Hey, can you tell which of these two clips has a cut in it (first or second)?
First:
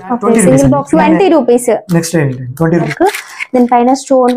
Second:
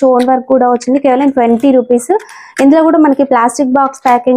first